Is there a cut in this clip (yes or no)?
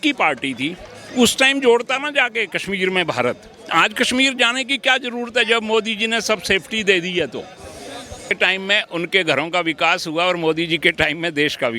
yes